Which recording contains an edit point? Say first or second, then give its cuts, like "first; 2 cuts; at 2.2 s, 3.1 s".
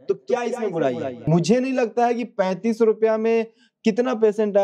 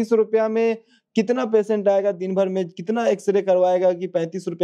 first; 1 cut; at 1.2 s